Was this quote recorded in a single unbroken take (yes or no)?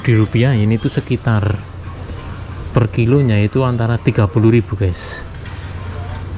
yes